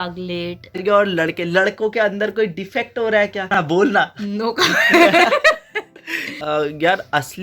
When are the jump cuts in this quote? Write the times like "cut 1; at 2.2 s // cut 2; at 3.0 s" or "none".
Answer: cut 1; at 0.8 s // cut 2; at 3.5 s // cut 3; at 6.3 s